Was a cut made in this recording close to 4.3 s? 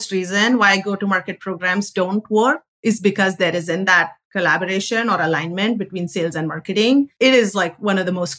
no; 0 cuts

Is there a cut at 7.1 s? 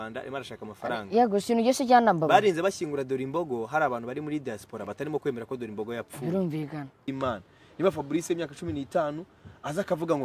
yes; 1 cut; at 7.1 s

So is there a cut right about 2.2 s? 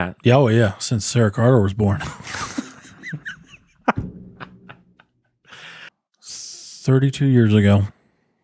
no; 1 cut; at 5.9 s

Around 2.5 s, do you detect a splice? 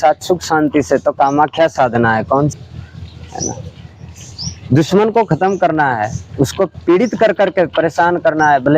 yes; 1 cut; at 2.5 s

